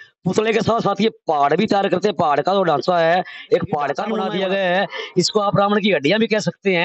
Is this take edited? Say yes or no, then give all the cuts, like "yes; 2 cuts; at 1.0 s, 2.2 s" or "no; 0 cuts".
yes; 1 cut; at 4.2 s